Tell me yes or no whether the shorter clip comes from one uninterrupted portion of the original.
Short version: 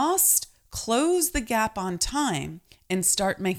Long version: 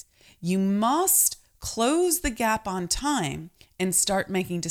yes